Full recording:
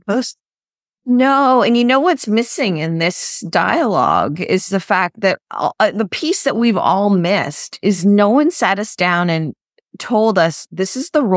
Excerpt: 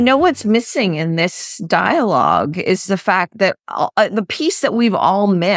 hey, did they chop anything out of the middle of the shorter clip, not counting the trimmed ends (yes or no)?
no